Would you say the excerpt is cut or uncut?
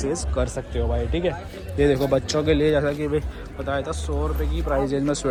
uncut